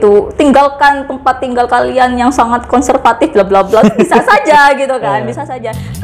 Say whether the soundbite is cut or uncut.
uncut